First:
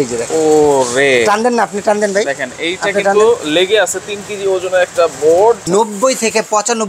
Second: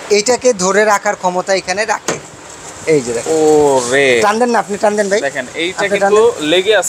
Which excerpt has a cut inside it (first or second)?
first